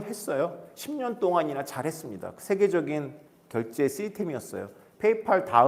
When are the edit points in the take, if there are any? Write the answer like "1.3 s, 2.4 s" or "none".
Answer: none